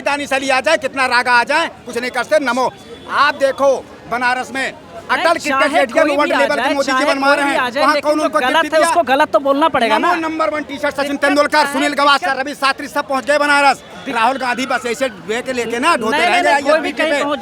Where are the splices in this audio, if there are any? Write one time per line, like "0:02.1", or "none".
none